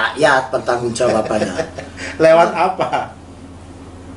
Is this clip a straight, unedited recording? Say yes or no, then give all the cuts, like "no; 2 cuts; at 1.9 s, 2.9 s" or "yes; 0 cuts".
yes; 0 cuts